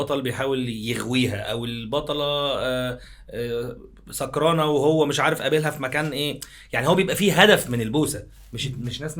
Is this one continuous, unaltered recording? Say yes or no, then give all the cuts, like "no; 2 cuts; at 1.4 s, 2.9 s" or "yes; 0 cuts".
yes; 0 cuts